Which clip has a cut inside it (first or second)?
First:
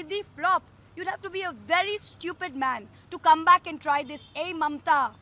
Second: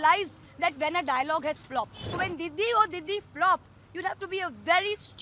second